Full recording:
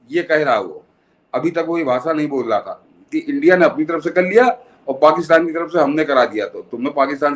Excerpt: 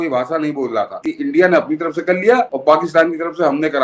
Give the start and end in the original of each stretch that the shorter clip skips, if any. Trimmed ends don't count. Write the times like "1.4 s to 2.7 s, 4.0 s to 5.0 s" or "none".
2.7 s to 3.0 s, 4.6 s to 4.9 s